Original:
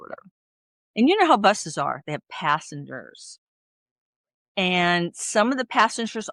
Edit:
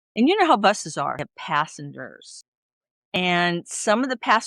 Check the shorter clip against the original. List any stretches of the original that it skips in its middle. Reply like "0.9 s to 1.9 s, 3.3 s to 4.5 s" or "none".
2.0 s to 2.1 s, 4.1 s to 4.6 s

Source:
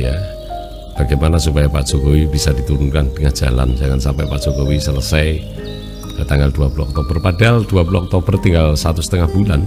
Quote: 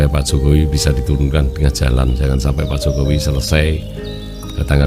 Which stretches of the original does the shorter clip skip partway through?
none

